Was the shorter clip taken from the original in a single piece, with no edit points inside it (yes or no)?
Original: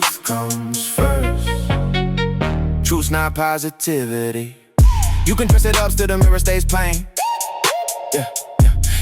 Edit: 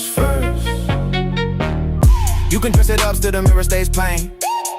no